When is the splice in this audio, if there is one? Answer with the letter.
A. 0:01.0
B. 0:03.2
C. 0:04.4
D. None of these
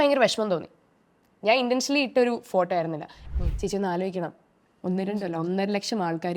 B